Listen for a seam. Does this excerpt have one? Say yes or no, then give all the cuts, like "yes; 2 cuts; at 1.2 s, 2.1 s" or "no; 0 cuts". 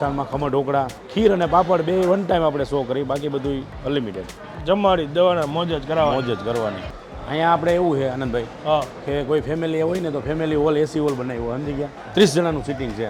yes; 2 cuts; at 6.9 s, 11.9 s